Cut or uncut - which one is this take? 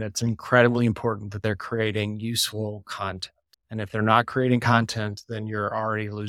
uncut